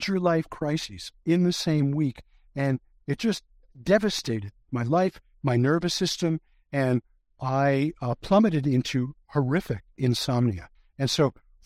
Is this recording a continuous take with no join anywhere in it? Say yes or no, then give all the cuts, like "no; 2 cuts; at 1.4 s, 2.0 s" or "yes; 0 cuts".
yes; 0 cuts